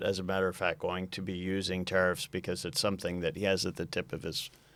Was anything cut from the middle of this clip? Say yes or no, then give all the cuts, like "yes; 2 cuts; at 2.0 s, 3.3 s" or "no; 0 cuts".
no; 0 cuts